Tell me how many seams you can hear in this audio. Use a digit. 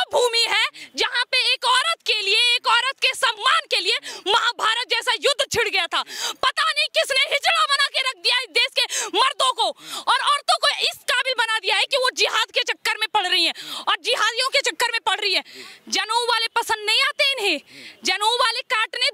0